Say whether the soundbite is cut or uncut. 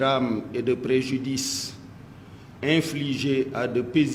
uncut